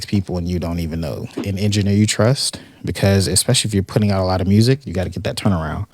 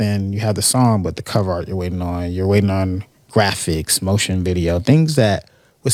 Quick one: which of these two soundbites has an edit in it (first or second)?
first